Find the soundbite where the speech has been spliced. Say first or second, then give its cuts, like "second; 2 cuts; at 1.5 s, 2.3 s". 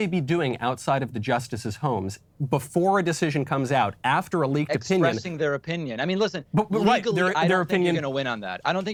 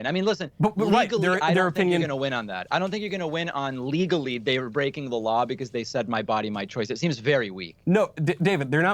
second; 1 cut; at 7.3 s